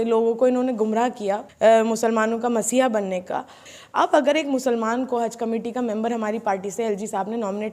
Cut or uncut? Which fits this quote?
cut